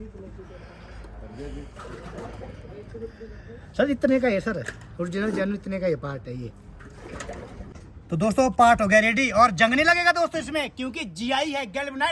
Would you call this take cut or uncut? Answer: cut